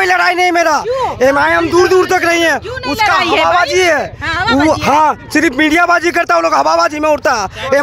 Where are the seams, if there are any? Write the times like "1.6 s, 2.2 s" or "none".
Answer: none